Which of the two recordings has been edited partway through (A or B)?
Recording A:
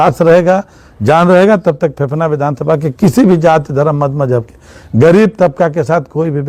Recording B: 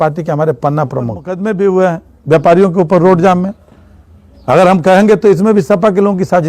B